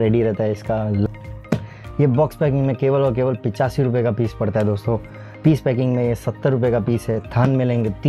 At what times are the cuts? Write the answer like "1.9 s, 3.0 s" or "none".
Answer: 1.1 s